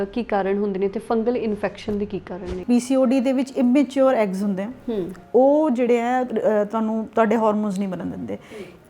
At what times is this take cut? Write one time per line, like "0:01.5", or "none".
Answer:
0:02.6